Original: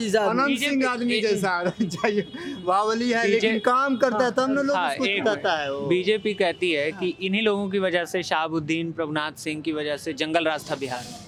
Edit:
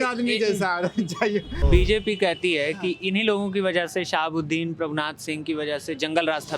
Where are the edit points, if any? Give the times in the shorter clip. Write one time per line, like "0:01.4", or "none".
0:01.6